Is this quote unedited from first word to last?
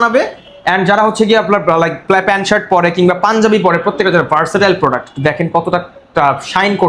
yes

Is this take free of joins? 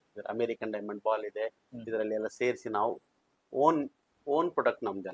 yes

